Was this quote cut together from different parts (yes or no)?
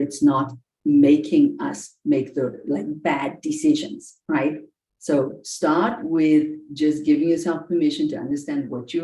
yes